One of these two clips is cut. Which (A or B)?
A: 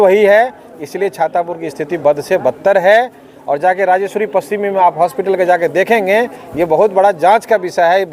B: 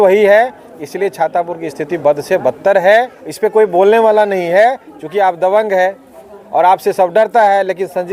B